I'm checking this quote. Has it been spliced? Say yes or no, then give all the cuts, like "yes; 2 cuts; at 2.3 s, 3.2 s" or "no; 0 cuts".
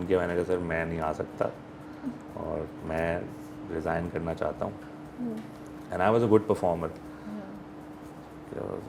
no; 0 cuts